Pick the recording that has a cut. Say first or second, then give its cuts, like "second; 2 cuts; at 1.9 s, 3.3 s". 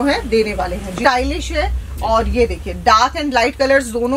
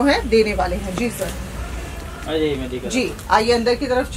first; 1 cut; at 1.0 s